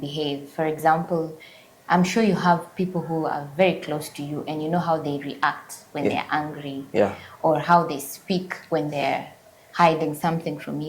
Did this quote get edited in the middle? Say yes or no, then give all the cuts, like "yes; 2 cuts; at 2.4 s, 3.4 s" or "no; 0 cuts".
no; 0 cuts